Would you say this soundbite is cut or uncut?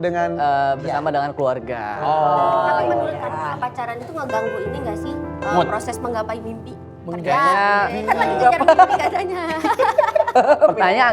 uncut